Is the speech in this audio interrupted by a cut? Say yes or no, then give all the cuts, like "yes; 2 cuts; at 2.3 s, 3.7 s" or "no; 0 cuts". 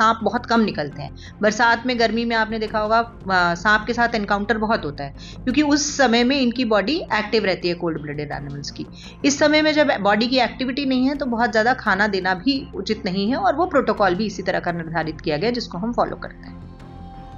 yes; 1 cut; at 16.3 s